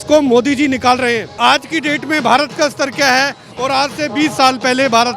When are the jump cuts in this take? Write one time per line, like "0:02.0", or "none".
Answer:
0:01.3